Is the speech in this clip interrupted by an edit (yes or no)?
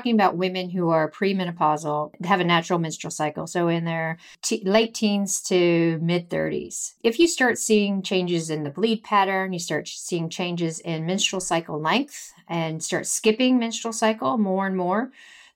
yes